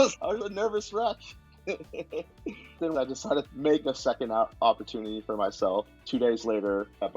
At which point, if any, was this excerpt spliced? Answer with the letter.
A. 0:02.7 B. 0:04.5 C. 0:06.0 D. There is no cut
A